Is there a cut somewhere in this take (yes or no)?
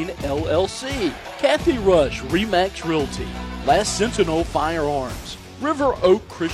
yes